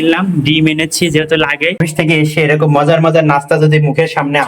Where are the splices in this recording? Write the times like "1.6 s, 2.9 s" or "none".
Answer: 1.8 s